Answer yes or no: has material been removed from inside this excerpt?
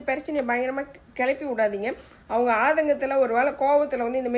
no